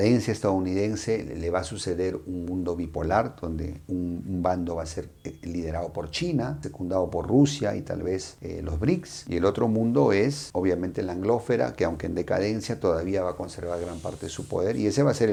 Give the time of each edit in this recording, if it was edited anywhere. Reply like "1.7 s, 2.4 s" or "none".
none